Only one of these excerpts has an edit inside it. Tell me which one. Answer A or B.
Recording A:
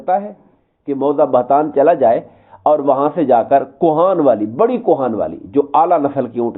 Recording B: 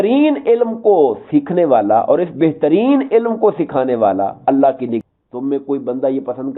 B